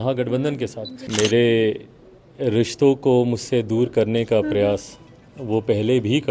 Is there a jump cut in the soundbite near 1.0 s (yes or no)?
yes